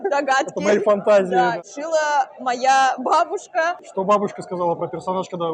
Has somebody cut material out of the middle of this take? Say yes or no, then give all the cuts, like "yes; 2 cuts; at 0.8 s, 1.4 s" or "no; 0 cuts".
yes; 2 cuts; at 1.6 s, 3.8 s